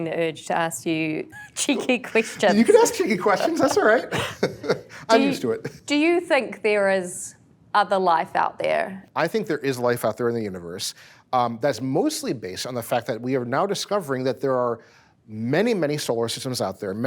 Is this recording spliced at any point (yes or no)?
yes